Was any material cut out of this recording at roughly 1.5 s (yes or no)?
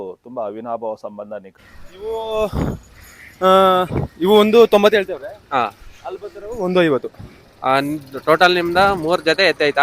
yes